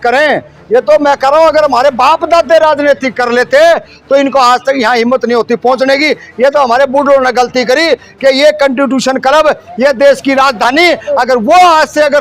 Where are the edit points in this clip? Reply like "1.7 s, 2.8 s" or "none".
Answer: none